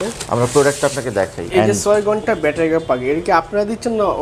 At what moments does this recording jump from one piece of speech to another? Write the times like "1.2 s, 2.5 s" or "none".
1.4 s